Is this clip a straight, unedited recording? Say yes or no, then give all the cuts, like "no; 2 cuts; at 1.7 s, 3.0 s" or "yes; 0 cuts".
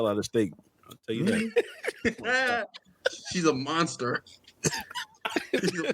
yes; 0 cuts